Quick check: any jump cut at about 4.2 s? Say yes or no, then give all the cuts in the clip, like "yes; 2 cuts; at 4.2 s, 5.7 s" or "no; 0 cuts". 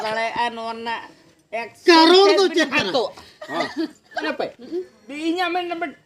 yes; 1 cut; at 4.2 s